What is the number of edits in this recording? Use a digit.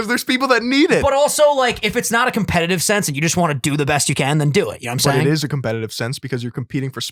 0